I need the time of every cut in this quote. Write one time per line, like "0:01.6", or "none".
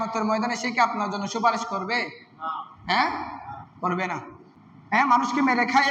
0:05.0